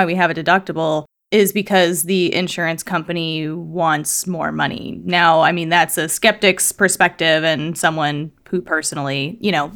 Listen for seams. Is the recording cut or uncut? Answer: uncut